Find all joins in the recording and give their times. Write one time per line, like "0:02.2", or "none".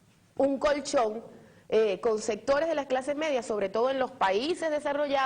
0:03.0